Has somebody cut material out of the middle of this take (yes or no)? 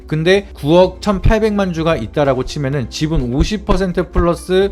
no